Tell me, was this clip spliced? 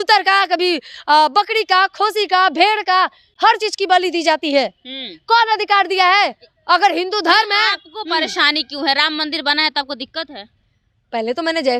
no; 0 cuts

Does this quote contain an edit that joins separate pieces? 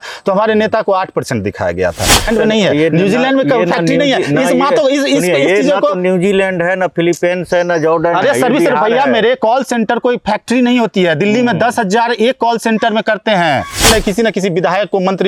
yes; 2 cuts; at 2.3 s, 13.8 s

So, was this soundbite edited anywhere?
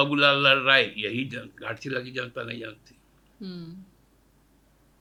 no; 0 cuts

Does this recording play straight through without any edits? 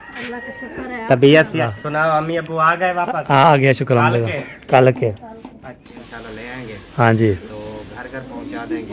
no; 2 cuts; at 1.6 s, 6.0 s

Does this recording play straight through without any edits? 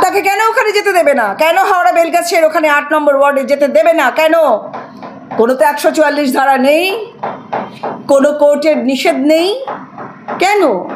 yes; 0 cuts

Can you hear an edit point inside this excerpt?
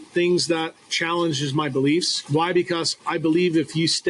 yes; 2 cuts; at 2.2 s, 2.9 s

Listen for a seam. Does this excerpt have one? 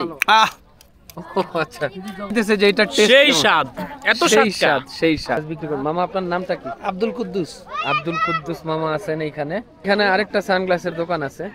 yes; 3 cuts; at 2.3 s, 5.4 s, 9.8 s

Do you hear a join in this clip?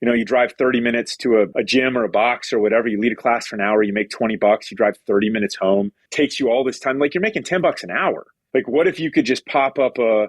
yes; 3 cuts; at 1.5 s, 6.0 s, 8.3 s

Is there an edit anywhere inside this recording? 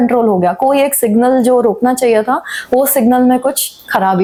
no; 0 cuts

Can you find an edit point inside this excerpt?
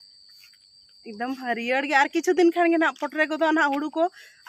no; 0 cuts

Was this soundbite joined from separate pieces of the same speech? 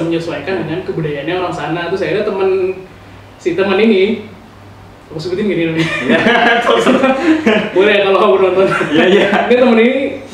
no; 0 cuts

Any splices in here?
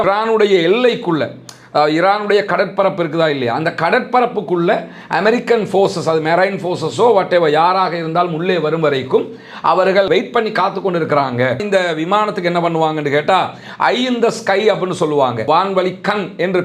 yes; 1 cut; at 11.6 s

